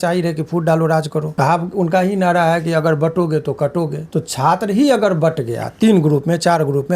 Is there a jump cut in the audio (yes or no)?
yes